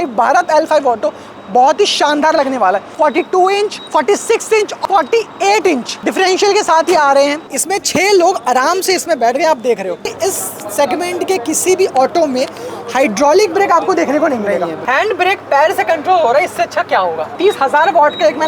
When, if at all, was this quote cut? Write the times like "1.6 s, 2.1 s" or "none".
2.9 s, 3.8 s, 4.8 s, 5.9 s, 7.4 s, 10.1 s, 14.8 s, 17.3 s